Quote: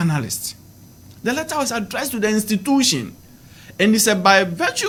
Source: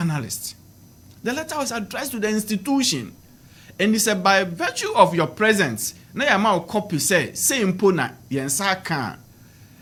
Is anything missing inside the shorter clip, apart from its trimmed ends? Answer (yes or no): no